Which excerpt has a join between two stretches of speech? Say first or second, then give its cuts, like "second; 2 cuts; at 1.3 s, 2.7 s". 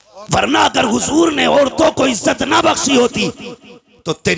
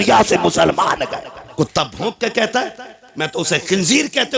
second; 1 cut; at 1.4 s